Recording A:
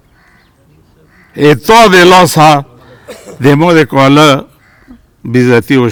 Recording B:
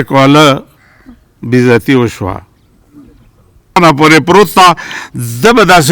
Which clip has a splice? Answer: B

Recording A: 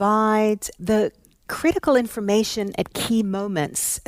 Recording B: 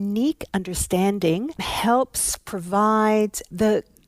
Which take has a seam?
B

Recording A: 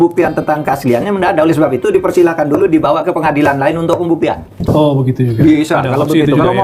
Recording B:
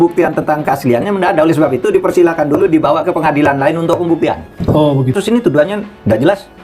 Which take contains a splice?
B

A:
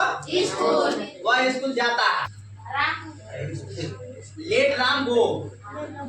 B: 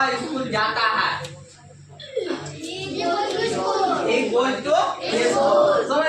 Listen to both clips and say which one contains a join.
A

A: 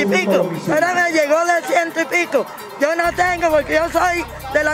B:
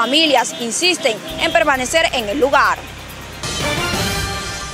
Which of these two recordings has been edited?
B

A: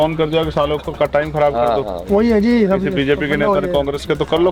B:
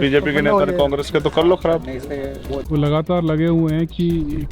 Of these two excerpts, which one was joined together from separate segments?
B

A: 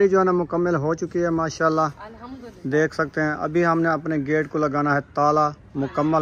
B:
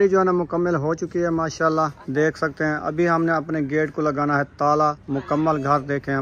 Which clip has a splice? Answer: B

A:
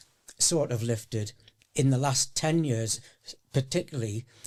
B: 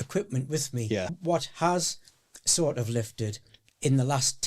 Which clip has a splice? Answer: B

